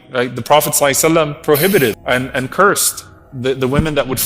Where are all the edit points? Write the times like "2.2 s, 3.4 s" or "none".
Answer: 2.0 s